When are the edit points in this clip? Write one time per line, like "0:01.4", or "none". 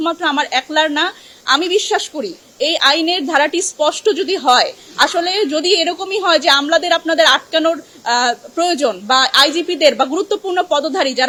none